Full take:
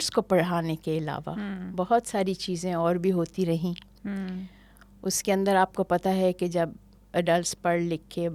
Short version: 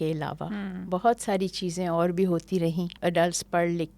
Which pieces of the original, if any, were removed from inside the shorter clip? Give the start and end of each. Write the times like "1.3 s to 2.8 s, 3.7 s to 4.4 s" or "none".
3.8 s to 7.0 s